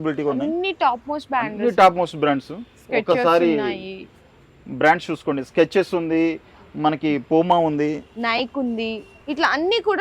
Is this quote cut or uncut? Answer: uncut